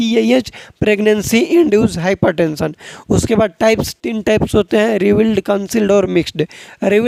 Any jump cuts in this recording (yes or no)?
no